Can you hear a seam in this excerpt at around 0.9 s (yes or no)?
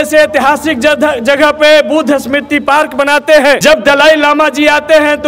no